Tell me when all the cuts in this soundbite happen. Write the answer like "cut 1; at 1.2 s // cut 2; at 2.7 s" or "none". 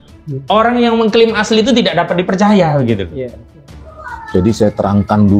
none